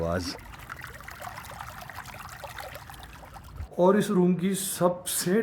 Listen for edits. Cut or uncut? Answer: cut